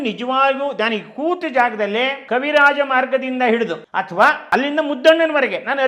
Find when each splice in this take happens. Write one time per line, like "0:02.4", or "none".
0:02.2
0:03.8
0:04.4